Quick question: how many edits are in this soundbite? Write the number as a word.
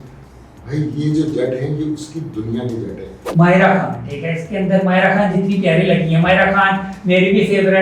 one